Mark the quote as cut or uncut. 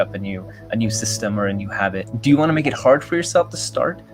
cut